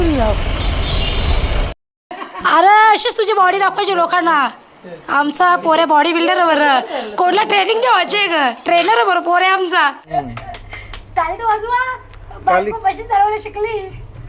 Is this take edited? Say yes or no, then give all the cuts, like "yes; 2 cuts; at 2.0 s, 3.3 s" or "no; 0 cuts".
yes; 2 cuts; at 1.7 s, 10.0 s